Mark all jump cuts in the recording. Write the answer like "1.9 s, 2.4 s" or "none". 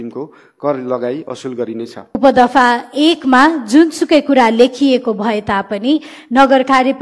2.2 s